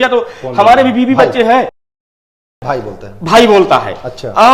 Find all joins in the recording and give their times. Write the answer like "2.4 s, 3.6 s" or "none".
none